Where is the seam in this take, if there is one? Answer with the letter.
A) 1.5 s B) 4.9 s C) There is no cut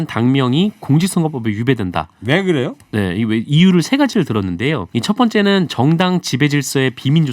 B